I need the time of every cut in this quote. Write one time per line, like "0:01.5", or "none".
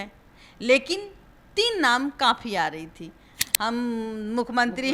0:03.4